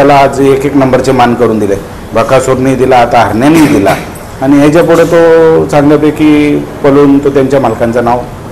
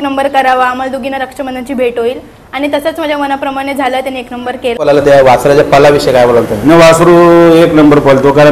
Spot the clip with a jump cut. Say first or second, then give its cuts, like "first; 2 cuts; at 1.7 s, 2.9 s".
second; 1 cut; at 4.9 s